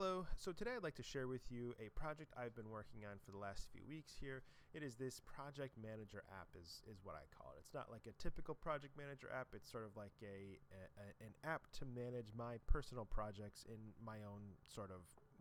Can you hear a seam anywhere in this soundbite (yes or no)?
no